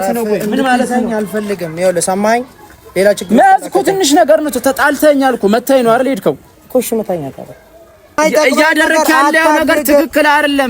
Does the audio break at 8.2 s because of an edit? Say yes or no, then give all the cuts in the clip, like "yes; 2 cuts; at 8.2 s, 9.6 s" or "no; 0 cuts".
yes; 1 cut; at 8.2 s